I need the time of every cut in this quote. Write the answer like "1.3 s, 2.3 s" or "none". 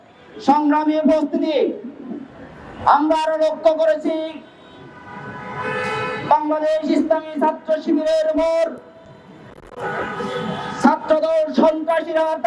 none